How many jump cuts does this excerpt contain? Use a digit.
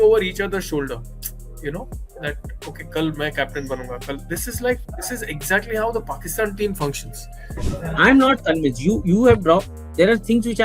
0